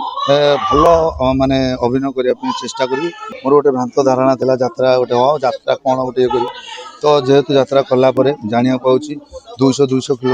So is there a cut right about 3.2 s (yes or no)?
yes